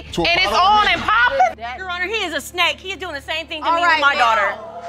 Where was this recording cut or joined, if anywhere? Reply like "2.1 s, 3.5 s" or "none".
1.6 s